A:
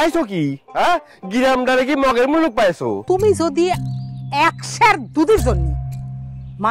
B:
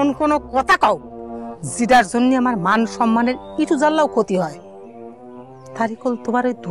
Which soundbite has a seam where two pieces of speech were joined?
A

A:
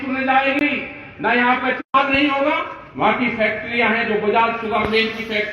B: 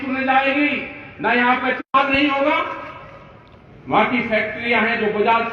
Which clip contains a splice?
A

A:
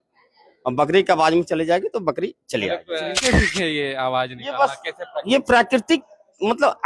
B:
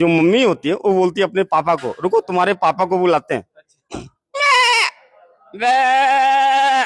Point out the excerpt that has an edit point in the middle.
A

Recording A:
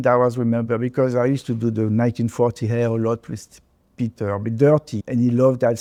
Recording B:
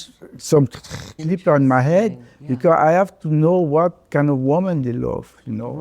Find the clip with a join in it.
B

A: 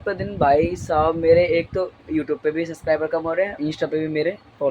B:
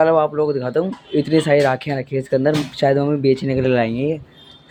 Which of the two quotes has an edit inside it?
A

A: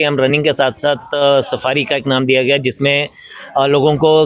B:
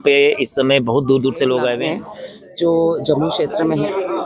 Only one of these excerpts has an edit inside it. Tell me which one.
B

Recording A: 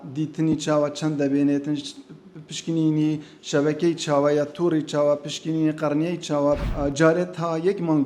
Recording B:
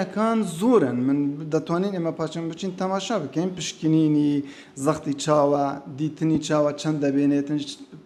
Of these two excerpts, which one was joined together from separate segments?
A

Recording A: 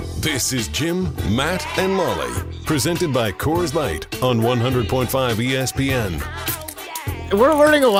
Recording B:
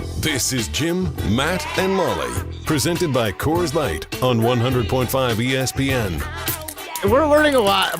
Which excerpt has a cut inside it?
B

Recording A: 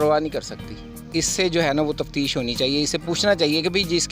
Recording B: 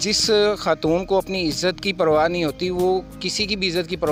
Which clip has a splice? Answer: A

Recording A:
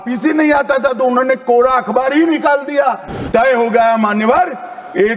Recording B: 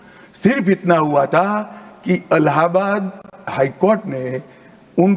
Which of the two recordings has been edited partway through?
A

